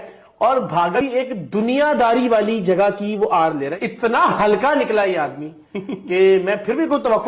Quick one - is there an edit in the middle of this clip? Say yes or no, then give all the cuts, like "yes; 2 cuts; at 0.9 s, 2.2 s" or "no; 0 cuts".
yes; 2 cuts; at 1.0 s, 3.7 s